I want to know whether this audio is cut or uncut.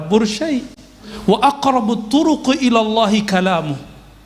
cut